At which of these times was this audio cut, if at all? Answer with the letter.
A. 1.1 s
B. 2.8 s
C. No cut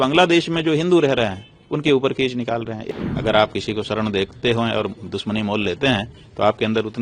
B